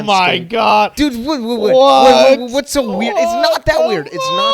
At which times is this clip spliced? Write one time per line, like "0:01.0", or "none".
none